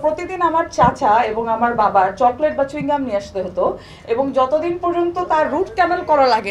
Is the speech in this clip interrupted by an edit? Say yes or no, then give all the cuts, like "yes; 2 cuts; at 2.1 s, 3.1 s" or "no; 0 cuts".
no; 0 cuts